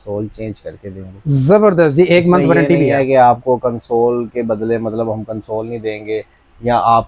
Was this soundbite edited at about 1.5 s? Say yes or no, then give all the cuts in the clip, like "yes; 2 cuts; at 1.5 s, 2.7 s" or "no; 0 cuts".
no; 0 cuts